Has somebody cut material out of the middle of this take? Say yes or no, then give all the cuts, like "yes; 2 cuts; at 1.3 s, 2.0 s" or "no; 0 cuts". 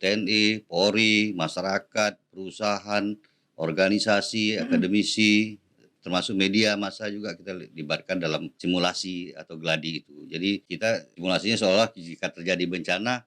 yes; 2 cuts; at 8.6 s, 11.1 s